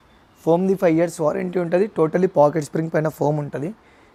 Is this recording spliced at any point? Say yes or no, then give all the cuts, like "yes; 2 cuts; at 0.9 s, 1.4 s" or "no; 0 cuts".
no; 0 cuts